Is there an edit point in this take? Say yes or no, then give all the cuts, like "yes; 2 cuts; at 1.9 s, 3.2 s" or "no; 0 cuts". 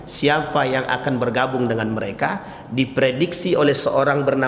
no; 0 cuts